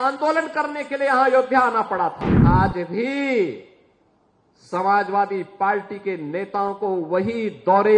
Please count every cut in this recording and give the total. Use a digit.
1